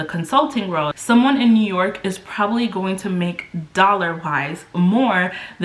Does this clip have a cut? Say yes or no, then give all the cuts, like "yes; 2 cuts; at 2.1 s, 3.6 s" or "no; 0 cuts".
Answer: yes; 1 cut; at 1.0 s